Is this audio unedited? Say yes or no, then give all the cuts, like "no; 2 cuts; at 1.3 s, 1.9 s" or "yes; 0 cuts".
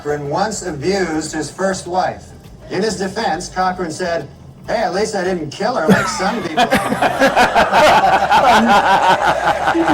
yes; 0 cuts